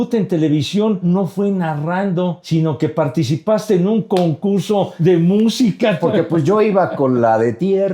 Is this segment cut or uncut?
cut